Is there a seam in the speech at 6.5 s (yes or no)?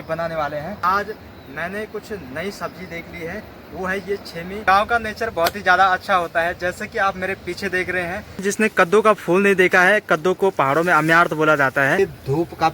no